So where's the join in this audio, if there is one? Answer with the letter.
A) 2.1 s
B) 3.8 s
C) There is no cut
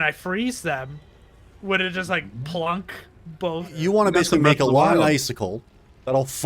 B